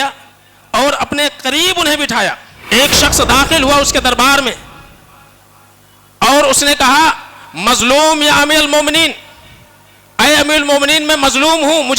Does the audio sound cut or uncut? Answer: cut